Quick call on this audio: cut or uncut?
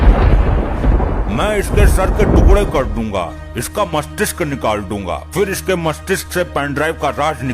uncut